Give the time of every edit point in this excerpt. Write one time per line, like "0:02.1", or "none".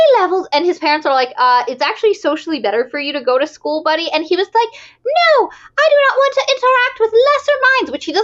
none